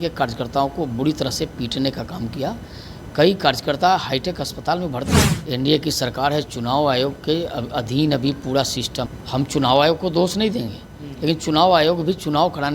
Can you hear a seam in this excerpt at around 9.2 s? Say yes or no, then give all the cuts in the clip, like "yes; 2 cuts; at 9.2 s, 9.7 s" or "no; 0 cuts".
yes; 2 cuts; at 5.3 s, 9.2 s